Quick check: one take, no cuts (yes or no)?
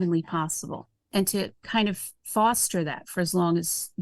no